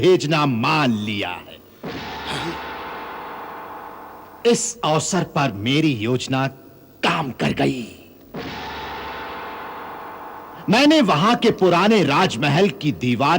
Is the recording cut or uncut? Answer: uncut